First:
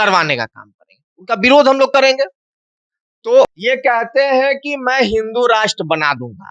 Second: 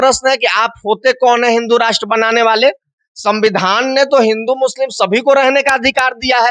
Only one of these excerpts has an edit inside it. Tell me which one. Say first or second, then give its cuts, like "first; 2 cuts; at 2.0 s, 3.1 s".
first; 1 cut; at 3.6 s